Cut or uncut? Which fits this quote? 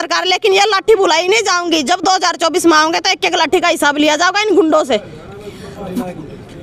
uncut